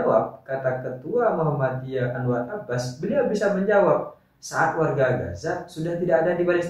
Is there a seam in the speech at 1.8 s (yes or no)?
no